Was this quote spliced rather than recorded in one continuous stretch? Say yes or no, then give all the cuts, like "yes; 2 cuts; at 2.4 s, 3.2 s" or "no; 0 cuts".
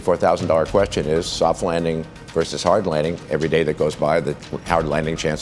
yes; 1 cut; at 3.2 s